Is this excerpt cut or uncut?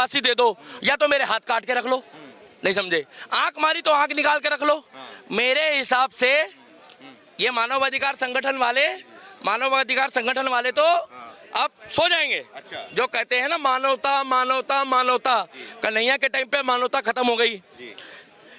uncut